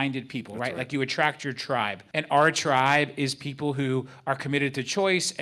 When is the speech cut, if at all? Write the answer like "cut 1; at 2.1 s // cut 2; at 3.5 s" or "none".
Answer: cut 1; at 2.1 s